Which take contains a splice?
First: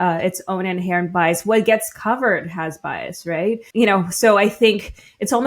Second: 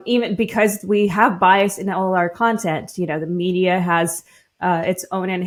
first; 1 cut; at 3.6 s

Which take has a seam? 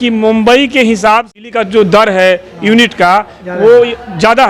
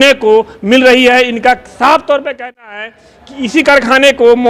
first; 1 cut; at 1.3 s

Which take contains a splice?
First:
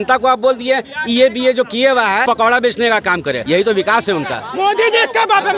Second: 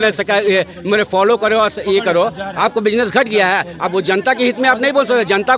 first; 3 cuts; at 2.2 s, 3.4 s, 4.4 s

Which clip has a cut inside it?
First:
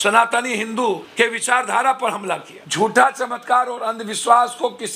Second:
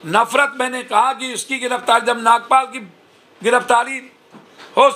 first; 2 cuts; at 1.1 s, 2.6 s

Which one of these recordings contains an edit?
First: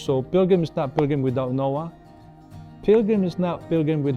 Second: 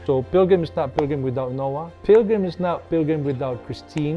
second; 1 cut; at 1.9 s

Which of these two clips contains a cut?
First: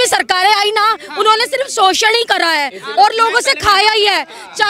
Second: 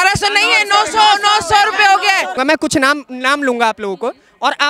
second; 1 cut; at 2.4 s

